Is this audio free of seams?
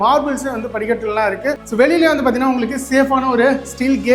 no; 1 cut; at 1.6 s

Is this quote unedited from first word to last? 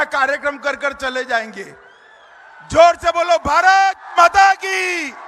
yes; 0 cuts

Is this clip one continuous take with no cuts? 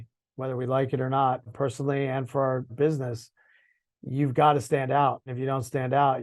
no; 3 cuts; at 1.5 s, 2.7 s, 5.3 s

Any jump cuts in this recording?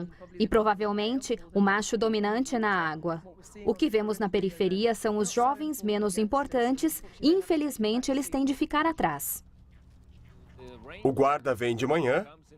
no; 0 cuts

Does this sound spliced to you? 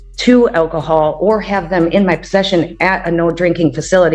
no; 0 cuts

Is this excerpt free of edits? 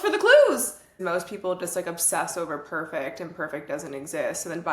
no; 1 cut; at 1.0 s

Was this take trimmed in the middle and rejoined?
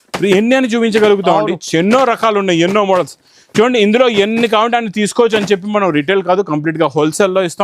no; 0 cuts

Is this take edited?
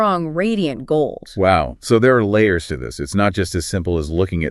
no; 0 cuts

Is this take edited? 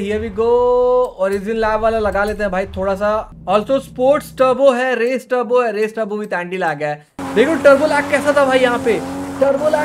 yes; 2 cuts; at 3.3 s, 7.2 s

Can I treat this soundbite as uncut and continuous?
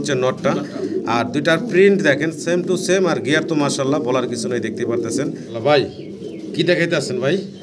no; 1 cut; at 5.5 s

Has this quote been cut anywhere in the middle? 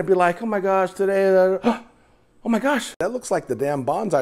yes; 1 cut; at 3.0 s

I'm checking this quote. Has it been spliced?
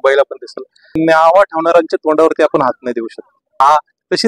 yes; 2 cuts; at 0.9 s, 3.5 s

